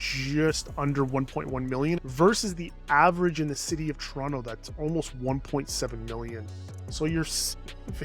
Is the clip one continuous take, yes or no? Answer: no